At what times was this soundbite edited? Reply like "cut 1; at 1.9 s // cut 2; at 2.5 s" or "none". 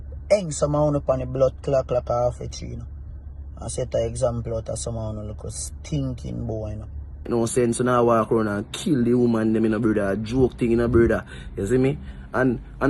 cut 1; at 7.3 s